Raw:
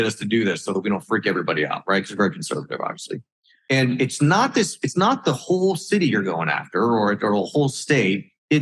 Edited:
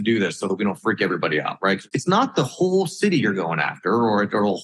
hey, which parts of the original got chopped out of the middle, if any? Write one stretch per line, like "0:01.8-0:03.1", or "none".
0:02.1-0:04.7